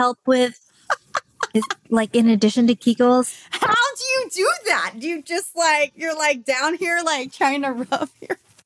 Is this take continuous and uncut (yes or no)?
yes